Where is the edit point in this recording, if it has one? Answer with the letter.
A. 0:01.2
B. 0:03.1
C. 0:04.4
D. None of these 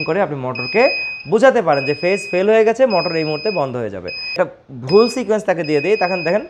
C